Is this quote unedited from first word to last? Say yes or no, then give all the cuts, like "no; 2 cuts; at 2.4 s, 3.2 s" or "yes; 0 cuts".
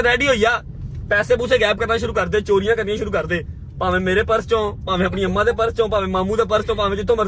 yes; 0 cuts